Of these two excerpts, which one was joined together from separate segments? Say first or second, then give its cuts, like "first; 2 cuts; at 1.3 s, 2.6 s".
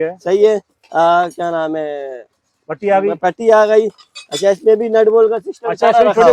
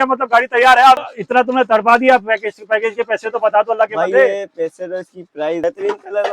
second; 2 cuts; at 1.0 s, 5.6 s